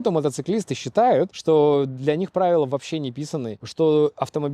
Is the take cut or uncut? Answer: cut